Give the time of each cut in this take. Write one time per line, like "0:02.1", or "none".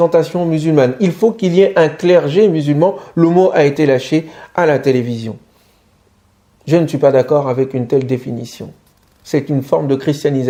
none